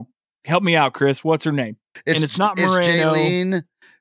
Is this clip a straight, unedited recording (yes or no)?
no